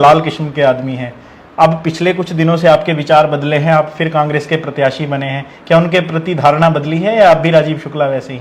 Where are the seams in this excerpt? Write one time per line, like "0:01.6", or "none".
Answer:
none